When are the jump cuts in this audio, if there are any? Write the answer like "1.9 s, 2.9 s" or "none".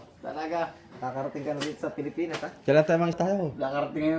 3.2 s